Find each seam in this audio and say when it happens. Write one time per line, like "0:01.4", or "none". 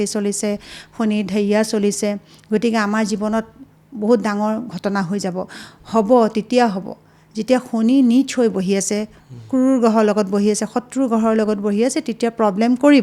none